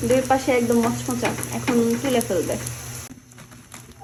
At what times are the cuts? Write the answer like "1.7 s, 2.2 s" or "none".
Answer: none